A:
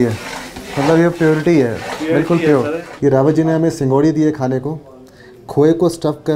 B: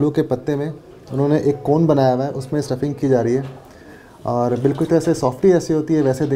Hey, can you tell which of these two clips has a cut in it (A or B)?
A